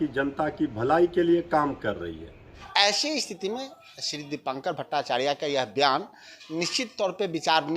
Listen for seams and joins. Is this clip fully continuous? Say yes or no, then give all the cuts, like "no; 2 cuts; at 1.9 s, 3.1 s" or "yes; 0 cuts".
no; 1 cut; at 2.6 s